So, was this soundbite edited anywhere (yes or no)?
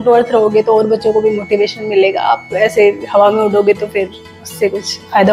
no